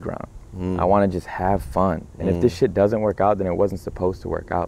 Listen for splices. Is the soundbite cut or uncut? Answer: uncut